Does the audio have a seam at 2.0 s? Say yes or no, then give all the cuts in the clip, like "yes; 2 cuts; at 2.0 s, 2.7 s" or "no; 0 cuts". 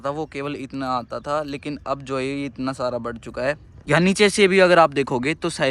no; 1 cut; at 3.7 s